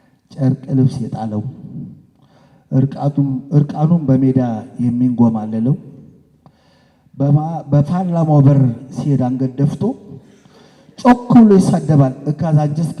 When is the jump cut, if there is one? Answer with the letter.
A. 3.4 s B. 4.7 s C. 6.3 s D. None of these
D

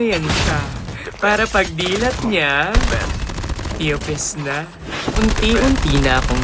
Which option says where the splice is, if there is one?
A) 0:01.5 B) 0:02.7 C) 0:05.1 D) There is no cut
C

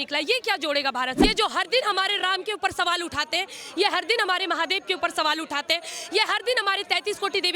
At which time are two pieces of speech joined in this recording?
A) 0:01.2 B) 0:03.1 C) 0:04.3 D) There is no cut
A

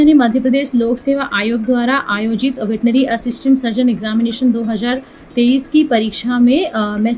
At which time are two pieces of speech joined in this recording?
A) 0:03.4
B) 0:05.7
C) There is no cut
C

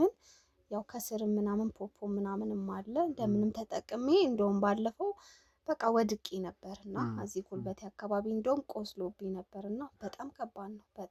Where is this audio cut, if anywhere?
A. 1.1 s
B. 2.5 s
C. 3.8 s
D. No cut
D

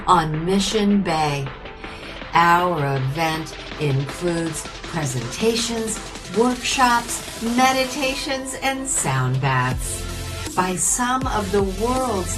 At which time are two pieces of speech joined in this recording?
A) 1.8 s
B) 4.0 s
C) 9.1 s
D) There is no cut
D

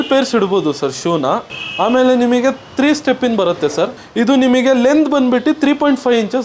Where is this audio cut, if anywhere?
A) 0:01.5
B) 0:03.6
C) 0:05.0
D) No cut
D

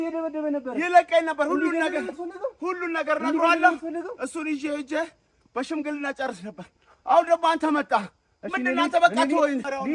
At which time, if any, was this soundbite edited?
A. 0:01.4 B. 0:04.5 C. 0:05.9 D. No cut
D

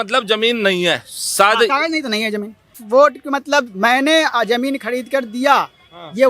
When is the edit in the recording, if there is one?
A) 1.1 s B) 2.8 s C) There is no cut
B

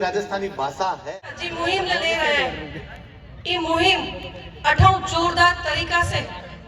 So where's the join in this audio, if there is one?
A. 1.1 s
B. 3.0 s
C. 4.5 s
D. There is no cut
A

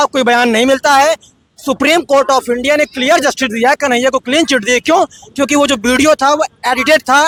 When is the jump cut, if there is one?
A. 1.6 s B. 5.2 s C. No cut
C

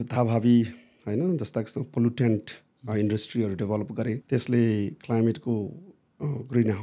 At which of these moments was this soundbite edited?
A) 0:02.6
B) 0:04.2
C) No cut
B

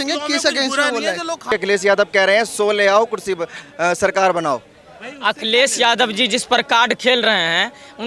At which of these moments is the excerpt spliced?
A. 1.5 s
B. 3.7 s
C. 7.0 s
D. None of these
A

